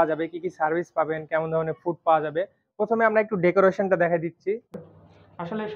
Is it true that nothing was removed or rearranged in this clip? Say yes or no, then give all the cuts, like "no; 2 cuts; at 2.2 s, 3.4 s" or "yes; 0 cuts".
no; 1 cut; at 4.7 s